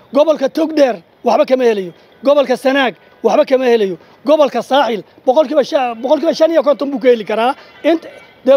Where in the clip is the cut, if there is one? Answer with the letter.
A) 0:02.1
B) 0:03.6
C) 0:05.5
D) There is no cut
D